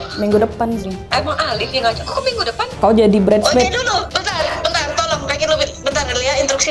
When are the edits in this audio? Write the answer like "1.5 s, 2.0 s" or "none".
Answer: 1.0 s, 2.7 s, 4.1 s